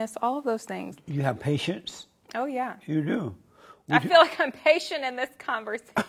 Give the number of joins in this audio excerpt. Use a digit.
1